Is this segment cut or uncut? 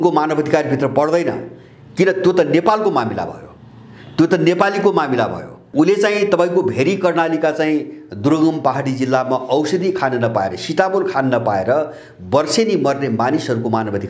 cut